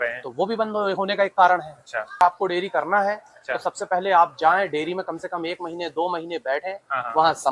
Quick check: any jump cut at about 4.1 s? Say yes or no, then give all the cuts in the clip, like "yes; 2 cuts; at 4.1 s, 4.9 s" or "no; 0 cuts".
no; 1 cut; at 2.2 s